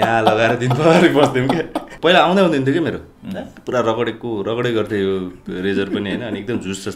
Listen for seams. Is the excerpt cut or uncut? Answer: cut